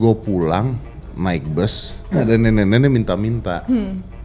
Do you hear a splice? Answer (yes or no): yes